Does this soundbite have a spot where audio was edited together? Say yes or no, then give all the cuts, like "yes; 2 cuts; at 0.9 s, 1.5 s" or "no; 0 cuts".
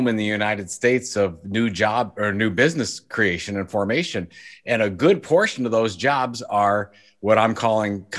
no; 0 cuts